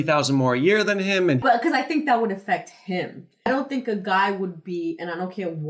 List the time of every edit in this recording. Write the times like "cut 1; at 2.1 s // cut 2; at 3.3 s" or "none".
cut 1; at 1.4 s // cut 2; at 3.5 s